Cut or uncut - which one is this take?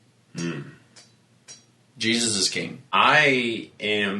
cut